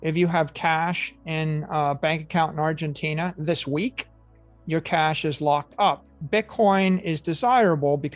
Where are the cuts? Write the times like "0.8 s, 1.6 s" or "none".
6.1 s